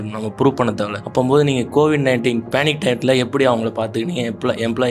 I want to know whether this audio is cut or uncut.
cut